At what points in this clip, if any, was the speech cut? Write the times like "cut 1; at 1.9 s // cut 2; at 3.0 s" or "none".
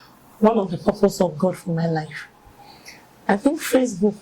none